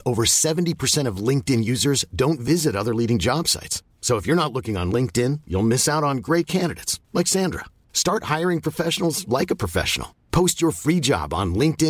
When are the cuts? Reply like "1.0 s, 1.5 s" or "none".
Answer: none